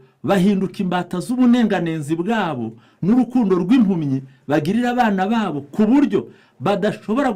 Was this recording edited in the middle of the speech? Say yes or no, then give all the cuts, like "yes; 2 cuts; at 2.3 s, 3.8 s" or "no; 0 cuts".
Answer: no; 0 cuts